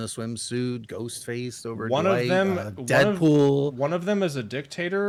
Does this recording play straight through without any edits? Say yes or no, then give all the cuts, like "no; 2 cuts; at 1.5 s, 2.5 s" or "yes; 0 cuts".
yes; 0 cuts